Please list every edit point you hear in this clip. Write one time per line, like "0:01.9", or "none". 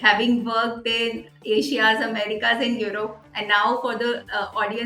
none